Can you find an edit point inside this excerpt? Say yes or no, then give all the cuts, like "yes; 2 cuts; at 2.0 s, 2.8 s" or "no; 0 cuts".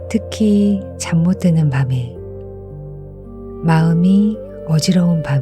yes; 2 cuts; at 2.1 s, 3.6 s